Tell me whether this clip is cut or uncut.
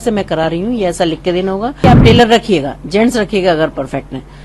cut